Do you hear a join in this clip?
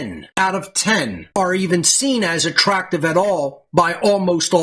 no; 0 cuts

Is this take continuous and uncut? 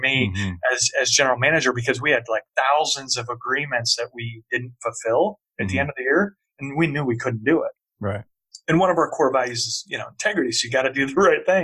yes; 0 cuts

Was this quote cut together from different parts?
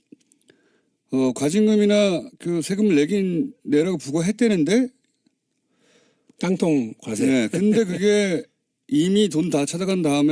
no; 0 cuts

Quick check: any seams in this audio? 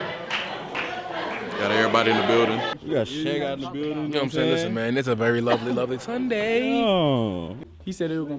yes; 2 cuts; at 2.8 s, 7.5 s

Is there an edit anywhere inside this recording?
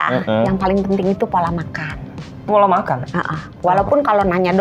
no; 0 cuts

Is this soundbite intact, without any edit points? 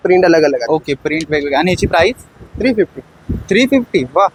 yes; 0 cuts

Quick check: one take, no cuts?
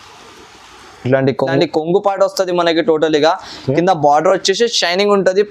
no; 1 cut; at 1.5 s

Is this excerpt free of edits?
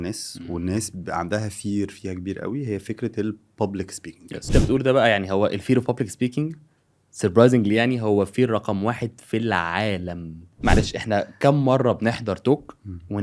no; 2 cuts; at 4.5 s, 10.4 s

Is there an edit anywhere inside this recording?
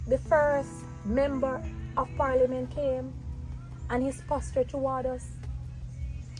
no; 0 cuts

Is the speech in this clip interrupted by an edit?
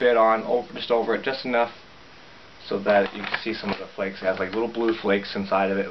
no; 0 cuts

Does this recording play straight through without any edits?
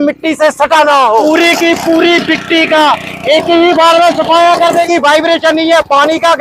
no; 2 cuts; at 1.2 s, 4.9 s

